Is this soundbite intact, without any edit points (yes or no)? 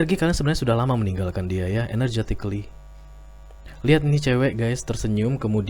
yes